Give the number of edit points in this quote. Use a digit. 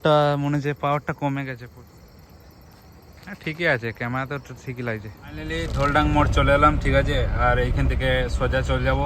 1